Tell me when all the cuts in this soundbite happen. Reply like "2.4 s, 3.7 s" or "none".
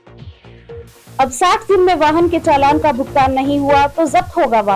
1.1 s